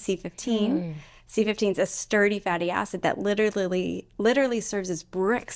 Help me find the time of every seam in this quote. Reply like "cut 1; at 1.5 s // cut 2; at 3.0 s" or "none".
none

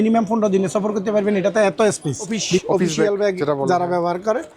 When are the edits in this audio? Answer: cut 1; at 2.6 s

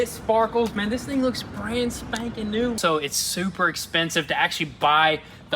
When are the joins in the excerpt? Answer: cut 1; at 2.8 s

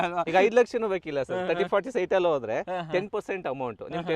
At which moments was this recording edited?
none

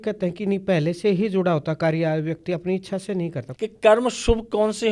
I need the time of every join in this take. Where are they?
cut 1; at 3.4 s

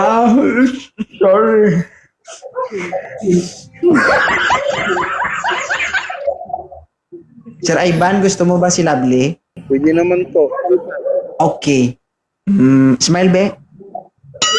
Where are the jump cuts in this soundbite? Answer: cut 1; at 9.5 s

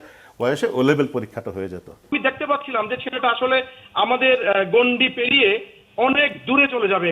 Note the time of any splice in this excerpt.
cut 1; at 2.1 s

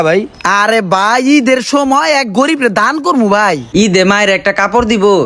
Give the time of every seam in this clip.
cut 1; at 3.6 s

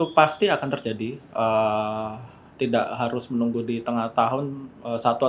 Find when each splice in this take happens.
none

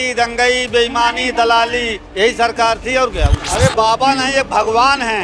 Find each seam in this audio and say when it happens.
cut 1; at 3.4 s

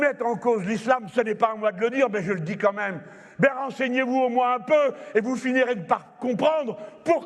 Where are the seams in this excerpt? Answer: none

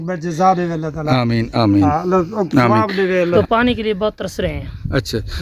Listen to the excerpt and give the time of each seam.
cut 1; at 3.3 s

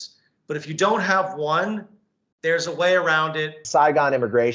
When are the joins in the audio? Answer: cut 1; at 3.6 s

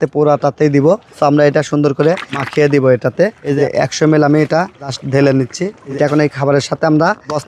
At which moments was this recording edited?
cut 1; at 3.6 s // cut 2; at 5.8 s

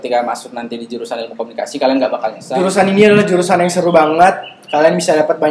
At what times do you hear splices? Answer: cut 1; at 2.4 s

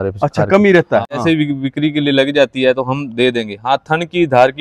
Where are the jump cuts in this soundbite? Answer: cut 1; at 1.2 s

